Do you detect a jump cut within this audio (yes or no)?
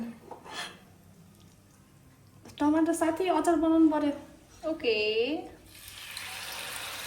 no